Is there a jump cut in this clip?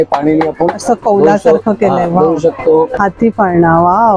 yes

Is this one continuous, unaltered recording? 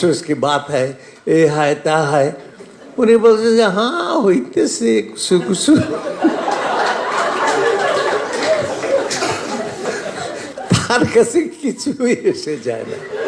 no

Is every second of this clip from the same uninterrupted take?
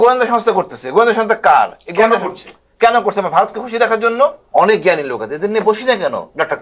no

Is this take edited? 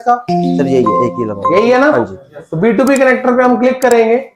no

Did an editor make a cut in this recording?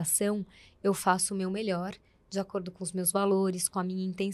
no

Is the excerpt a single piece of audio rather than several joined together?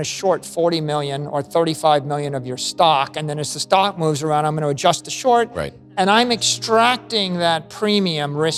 yes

